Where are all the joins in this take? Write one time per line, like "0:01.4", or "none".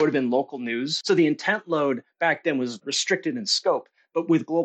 0:00.9
0:02.9